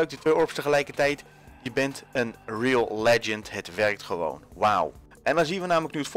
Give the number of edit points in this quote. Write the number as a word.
one